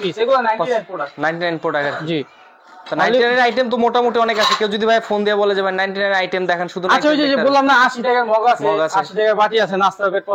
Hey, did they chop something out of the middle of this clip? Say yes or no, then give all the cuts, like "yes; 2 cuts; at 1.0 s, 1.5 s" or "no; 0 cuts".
no; 0 cuts